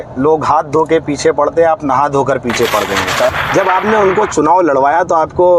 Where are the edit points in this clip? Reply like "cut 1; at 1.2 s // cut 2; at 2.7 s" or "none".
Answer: cut 1; at 3.3 s